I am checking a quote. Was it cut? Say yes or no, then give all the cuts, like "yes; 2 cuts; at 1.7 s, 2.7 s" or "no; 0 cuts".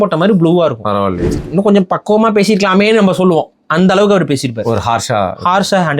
yes; 1 cut; at 1.3 s